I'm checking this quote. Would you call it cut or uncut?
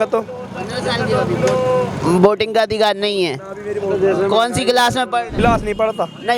cut